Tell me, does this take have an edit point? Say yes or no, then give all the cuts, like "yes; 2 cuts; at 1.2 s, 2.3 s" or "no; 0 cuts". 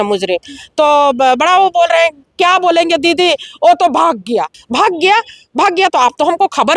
yes; 1 cut; at 4.6 s